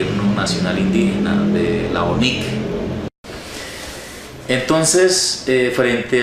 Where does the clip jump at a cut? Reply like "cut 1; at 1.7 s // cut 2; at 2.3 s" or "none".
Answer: cut 1; at 2.9 s